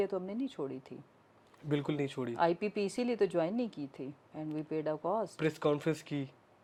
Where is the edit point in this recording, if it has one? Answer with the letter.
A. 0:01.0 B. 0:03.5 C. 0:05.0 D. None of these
D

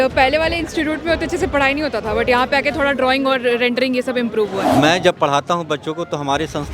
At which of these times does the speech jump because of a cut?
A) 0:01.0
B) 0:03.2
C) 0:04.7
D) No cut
C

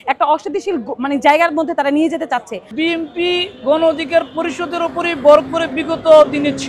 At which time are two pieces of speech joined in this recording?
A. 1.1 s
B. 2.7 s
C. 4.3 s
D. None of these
B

